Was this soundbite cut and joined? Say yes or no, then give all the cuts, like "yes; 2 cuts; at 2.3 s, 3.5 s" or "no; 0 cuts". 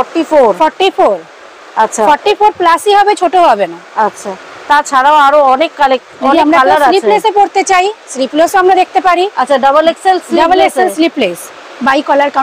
no; 0 cuts